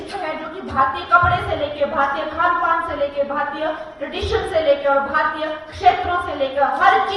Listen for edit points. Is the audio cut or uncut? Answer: uncut